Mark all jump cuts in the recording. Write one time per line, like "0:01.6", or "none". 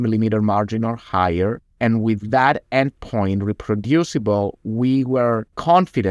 0:01.7